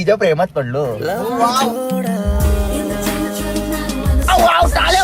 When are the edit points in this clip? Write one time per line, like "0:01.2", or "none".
none